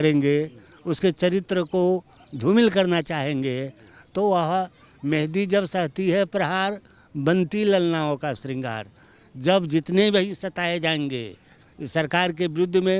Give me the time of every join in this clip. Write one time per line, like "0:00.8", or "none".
none